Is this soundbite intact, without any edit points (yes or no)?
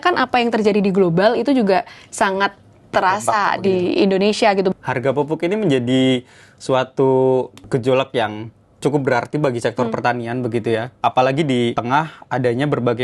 no